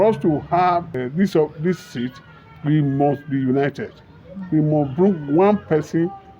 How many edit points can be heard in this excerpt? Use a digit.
1